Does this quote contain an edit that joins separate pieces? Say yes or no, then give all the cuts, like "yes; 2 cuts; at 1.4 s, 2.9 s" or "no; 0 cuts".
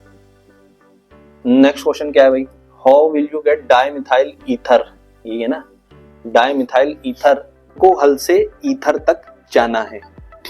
yes; 1 cut; at 7.7 s